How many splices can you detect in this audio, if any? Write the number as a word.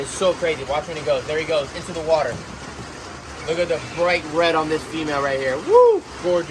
zero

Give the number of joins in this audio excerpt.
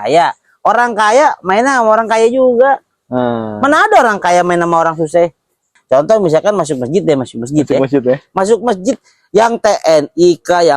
one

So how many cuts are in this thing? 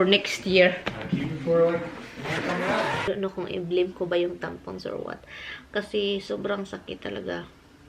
one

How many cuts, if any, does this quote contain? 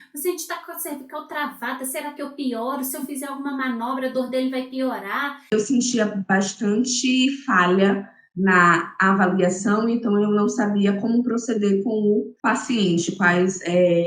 two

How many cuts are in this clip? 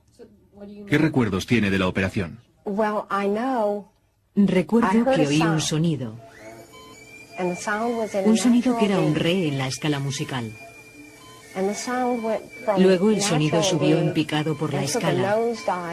one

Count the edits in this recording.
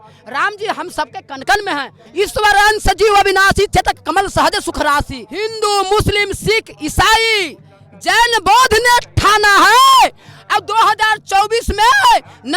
two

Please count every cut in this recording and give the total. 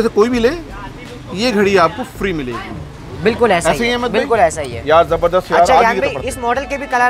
zero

